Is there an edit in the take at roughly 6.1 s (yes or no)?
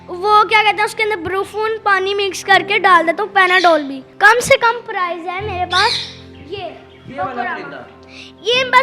no